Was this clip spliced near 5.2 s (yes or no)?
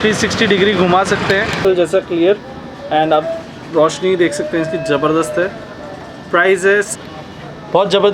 no